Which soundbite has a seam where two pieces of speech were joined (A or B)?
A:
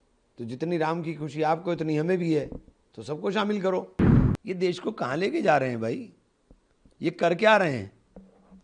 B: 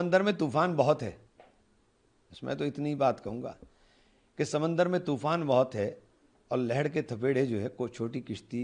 A